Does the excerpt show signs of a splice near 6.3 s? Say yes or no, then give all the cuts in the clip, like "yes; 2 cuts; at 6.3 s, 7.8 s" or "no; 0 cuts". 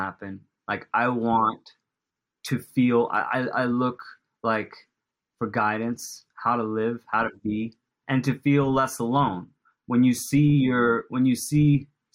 no; 1 cut; at 7.9 s